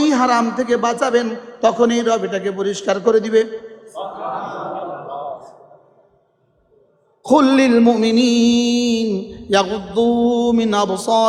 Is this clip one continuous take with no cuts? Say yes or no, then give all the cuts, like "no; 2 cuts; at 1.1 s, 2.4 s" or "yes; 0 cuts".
yes; 0 cuts